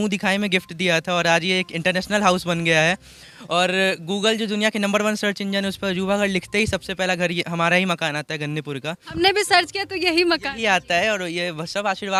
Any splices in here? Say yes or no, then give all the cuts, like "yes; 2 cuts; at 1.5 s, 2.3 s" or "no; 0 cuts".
no; 0 cuts